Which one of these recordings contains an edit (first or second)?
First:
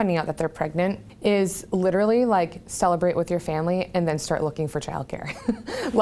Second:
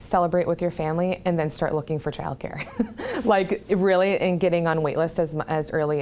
first